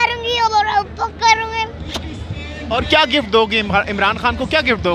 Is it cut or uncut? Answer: uncut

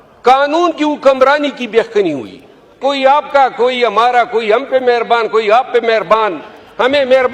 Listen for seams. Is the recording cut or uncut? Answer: cut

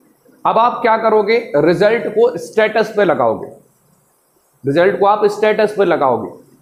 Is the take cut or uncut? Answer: uncut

